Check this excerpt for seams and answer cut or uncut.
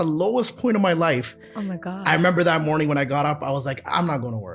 uncut